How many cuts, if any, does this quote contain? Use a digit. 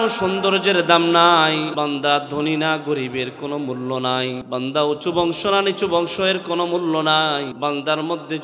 3